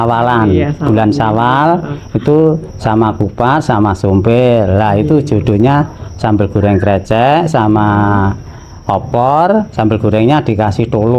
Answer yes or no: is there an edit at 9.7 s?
no